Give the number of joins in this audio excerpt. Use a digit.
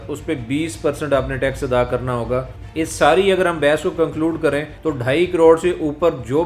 2